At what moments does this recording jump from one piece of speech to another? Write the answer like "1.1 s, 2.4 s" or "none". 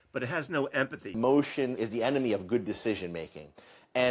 1.1 s, 1.8 s